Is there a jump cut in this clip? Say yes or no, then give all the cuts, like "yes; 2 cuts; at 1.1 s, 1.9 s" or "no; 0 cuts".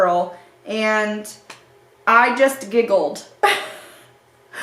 no; 0 cuts